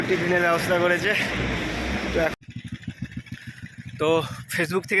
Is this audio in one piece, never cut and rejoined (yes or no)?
no